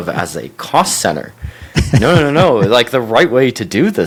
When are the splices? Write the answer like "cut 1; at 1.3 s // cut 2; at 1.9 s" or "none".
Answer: none